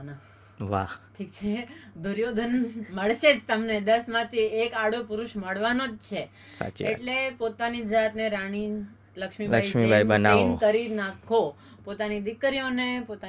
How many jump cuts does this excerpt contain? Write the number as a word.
zero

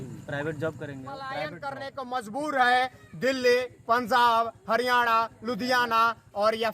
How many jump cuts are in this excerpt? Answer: one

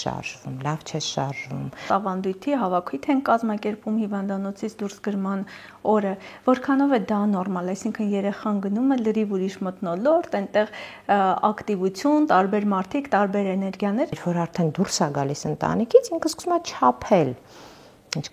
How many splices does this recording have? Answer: two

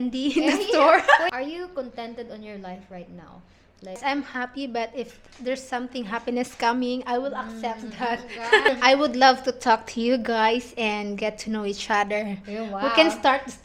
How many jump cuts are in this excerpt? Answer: three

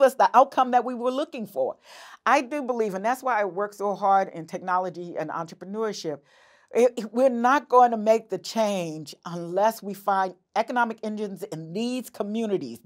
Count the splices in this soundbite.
zero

